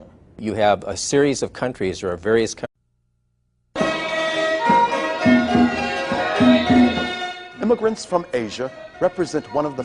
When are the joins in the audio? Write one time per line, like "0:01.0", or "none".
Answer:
none